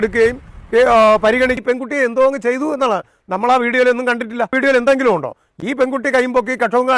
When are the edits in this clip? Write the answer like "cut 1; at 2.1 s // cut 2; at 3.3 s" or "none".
cut 1; at 1.6 s // cut 2; at 4.5 s